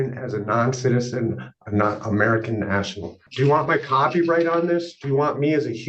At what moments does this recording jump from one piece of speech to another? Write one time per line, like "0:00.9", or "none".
0:03.3